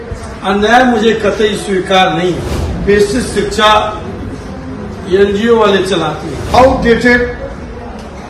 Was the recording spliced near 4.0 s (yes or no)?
no